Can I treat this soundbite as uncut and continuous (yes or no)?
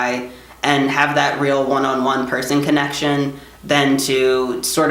yes